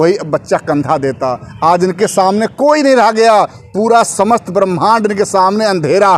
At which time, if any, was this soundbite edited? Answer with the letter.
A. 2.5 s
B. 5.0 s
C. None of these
C